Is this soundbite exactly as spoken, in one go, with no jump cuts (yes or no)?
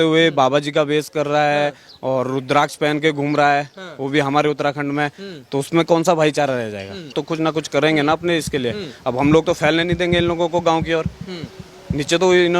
no